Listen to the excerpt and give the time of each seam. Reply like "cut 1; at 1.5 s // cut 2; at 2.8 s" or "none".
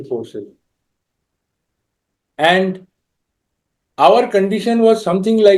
none